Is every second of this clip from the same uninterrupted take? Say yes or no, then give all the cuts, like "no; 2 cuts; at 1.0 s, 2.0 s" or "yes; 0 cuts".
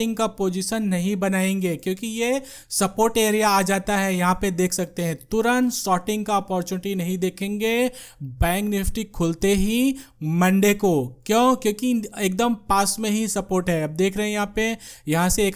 yes; 0 cuts